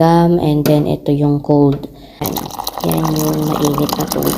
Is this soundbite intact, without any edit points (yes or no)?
no